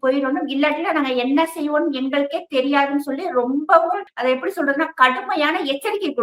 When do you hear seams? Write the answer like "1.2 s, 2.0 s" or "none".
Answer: 4.1 s

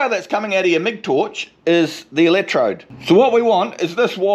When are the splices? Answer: none

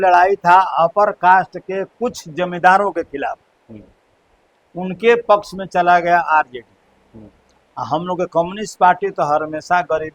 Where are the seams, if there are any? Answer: none

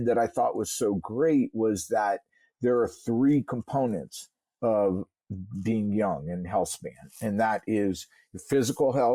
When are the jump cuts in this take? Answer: none

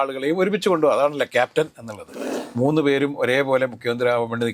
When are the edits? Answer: 2.3 s

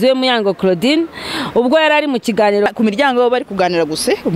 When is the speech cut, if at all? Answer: 2.7 s

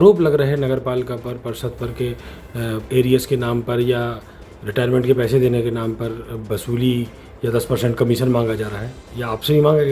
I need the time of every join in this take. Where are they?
2.9 s

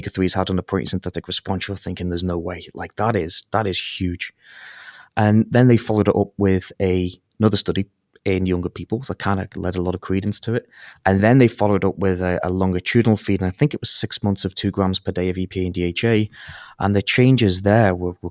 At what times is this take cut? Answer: none

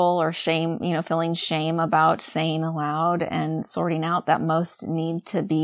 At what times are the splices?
none

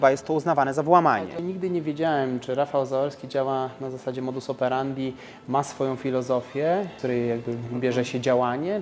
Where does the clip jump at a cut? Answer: 1.3 s, 6.9 s

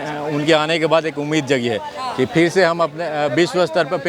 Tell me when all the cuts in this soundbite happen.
none

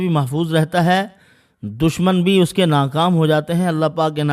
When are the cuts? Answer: none

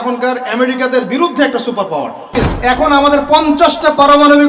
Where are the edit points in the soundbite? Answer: 2.5 s

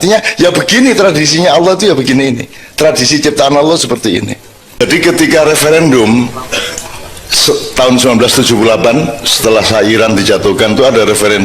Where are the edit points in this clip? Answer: 4.8 s

